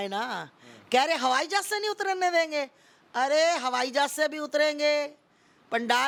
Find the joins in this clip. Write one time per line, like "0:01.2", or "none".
none